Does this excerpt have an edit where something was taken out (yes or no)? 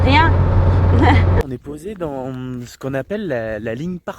yes